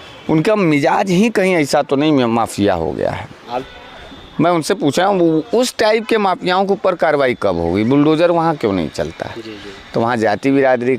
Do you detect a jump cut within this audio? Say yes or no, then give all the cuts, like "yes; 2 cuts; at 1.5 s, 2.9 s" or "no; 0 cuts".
yes; 1 cut; at 3.6 s